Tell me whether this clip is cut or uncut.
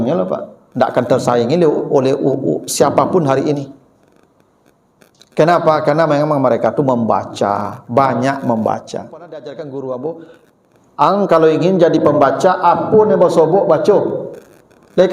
cut